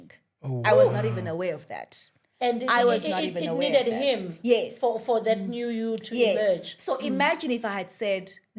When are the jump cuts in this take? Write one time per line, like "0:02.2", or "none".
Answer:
none